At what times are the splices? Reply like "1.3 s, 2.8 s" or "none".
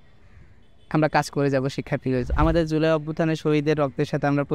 2.3 s